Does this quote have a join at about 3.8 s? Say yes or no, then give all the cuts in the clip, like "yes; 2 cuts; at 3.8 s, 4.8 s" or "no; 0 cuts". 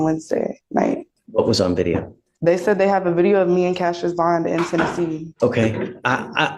no; 2 cuts; at 1.2 s, 5.3 s